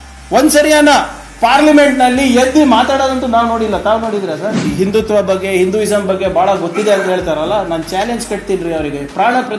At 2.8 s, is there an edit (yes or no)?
no